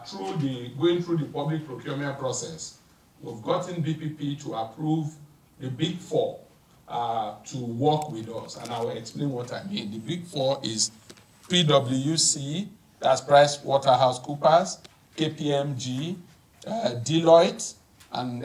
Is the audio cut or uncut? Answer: uncut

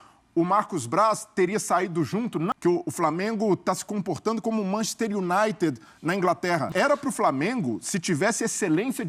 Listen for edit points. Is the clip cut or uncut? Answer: cut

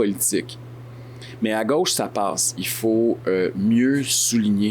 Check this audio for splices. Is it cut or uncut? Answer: cut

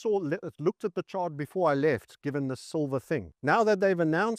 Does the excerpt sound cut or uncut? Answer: cut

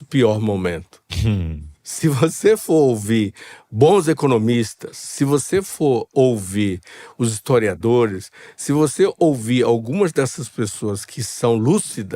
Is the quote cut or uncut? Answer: uncut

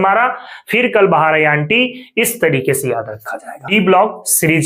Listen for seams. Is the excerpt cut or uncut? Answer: cut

